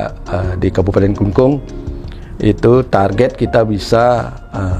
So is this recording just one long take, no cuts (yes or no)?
yes